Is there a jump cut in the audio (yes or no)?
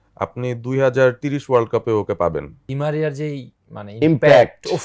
yes